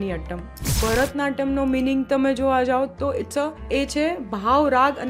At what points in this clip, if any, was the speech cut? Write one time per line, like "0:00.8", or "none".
0:00.8
0:03.6